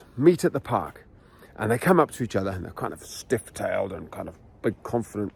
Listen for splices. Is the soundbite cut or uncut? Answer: uncut